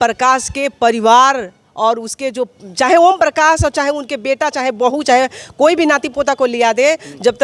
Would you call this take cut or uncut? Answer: uncut